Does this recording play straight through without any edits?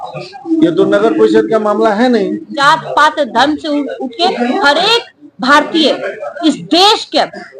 no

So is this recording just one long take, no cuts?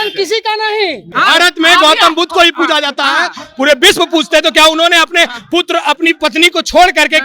no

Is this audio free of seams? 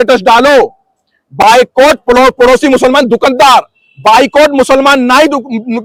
yes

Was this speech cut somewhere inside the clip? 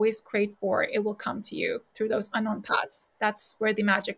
no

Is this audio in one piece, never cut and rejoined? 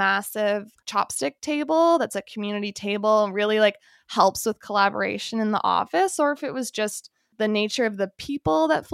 yes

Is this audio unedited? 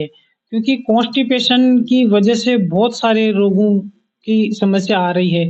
yes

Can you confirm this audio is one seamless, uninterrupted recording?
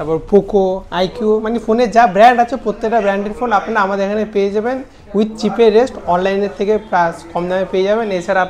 yes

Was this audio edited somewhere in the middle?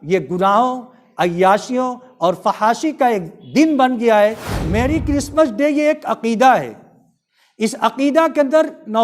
yes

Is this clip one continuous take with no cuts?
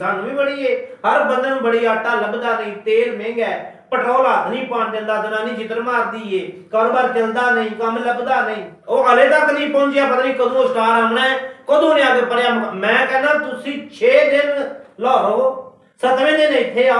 no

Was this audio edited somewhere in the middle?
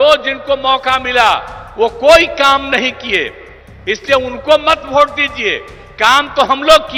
no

